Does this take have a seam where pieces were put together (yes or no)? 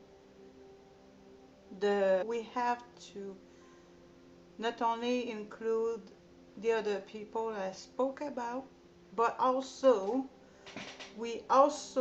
no